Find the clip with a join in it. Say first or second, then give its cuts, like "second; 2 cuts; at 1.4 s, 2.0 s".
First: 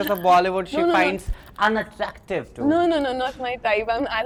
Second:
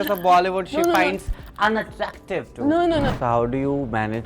second; 1 cut; at 3.1 s